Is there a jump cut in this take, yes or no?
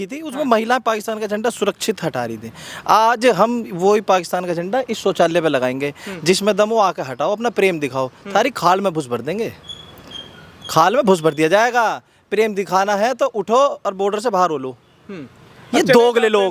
no